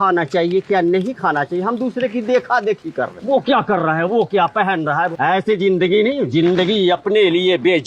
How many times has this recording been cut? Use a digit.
2